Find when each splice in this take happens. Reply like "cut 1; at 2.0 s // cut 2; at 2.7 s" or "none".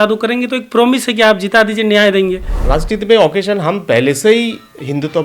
cut 1; at 2.5 s